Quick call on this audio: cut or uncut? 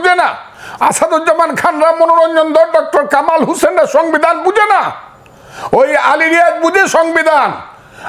uncut